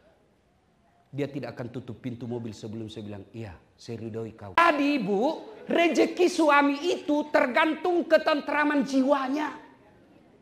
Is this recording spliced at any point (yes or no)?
yes